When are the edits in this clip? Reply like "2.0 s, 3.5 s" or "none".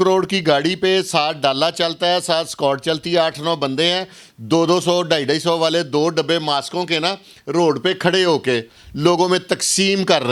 none